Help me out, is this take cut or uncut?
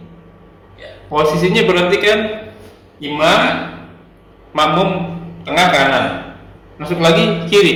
uncut